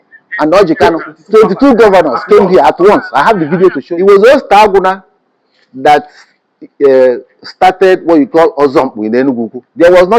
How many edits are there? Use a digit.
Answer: 1